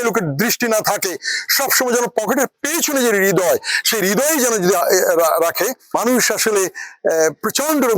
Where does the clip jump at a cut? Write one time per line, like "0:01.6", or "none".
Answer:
0:06.0